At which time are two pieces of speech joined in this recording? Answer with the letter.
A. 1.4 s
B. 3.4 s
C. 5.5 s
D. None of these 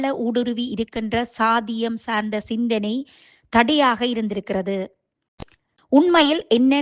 C